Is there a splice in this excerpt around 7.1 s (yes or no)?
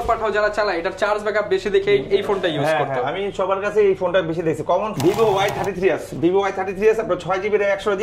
no